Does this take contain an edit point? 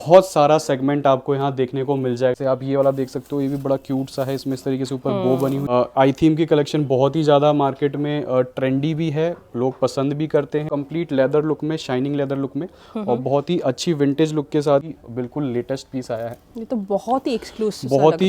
yes; 4 cuts; at 2.4 s, 5.7 s, 10.7 s, 14.8 s

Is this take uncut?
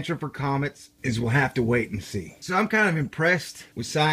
yes; 0 cuts

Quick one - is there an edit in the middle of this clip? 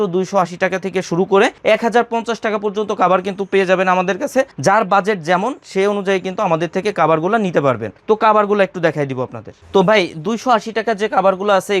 no; 0 cuts

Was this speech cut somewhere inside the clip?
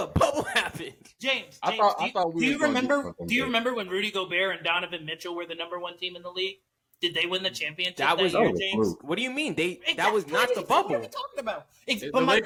no; 0 cuts

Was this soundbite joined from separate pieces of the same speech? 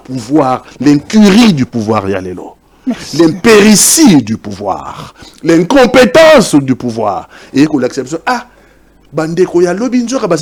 no; 0 cuts

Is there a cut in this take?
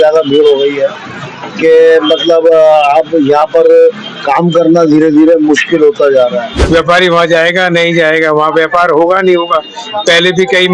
yes; 1 cut; at 6.5 s

